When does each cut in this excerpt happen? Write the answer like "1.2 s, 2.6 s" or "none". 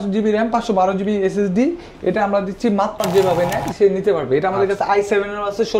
3.0 s